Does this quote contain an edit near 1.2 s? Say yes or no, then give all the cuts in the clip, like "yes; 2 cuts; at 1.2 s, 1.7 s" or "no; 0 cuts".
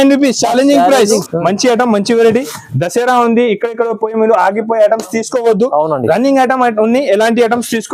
yes; 1 cut; at 1.2 s